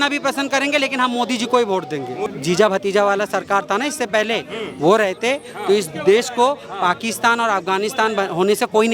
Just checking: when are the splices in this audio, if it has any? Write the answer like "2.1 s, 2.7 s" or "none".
2.2 s

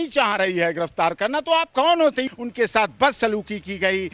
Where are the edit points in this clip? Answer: 2.3 s

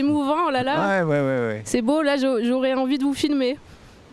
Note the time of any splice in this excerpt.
none

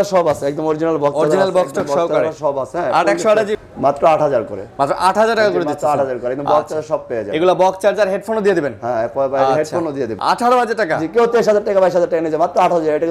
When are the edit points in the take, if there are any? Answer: 3.6 s, 10.2 s

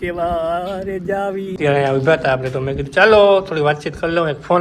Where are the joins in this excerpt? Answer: 1.5 s

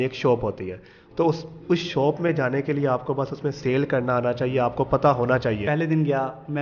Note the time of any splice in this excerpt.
5.6 s

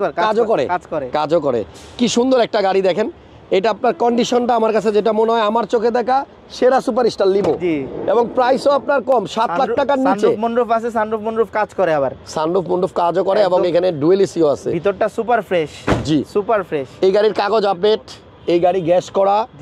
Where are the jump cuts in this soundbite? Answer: none

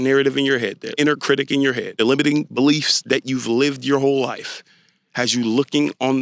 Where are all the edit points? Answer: 0.8 s, 1.9 s

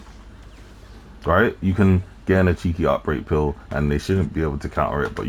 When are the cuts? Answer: none

